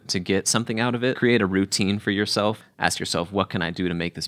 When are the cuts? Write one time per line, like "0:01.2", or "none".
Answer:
0:01.2
0:02.6